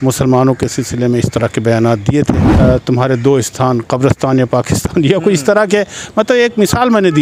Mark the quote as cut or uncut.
cut